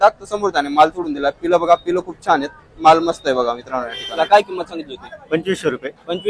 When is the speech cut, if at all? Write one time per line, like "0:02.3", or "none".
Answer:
0:04.1